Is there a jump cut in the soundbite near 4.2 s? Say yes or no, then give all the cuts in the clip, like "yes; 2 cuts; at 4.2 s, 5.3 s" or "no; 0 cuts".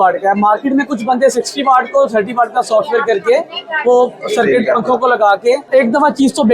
no; 1 cut; at 5.6 s